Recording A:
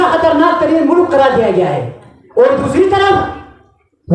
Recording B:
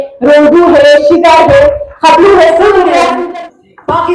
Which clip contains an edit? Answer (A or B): B